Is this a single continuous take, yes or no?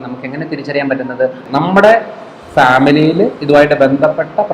no